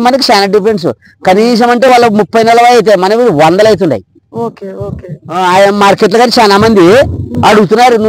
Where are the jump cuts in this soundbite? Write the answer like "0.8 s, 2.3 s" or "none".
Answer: none